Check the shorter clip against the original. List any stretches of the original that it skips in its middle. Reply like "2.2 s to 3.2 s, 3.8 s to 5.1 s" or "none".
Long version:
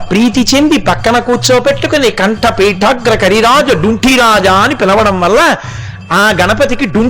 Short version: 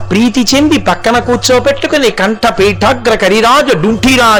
none